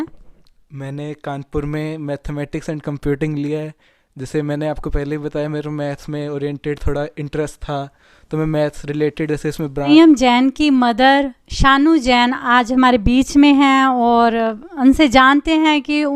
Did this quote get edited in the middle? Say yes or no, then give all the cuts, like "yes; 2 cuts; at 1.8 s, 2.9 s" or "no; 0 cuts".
yes; 1 cut; at 9.9 s